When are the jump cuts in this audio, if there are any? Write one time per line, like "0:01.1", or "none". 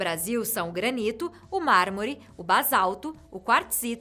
0:02.3

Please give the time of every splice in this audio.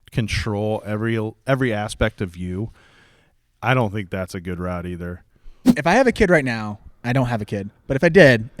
0:05.8

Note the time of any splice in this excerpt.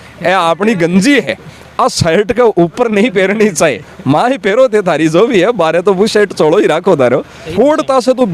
0:07.4

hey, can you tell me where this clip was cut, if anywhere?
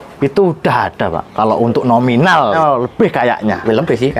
0:02.6

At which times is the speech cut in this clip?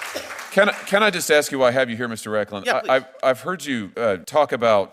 0:04.0

